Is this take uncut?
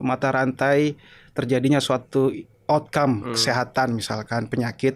yes; 0 cuts

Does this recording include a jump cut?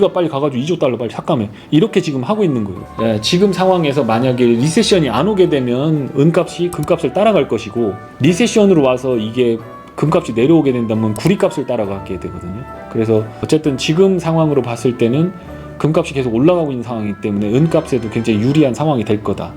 yes; 1 cut; at 2.8 s

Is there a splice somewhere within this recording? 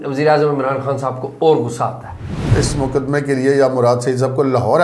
yes; 1 cut; at 2.4 s

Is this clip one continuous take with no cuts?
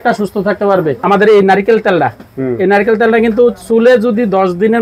no; 1 cut; at 1.0 s

